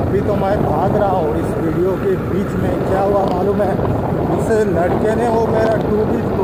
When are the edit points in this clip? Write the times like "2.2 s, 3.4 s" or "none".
none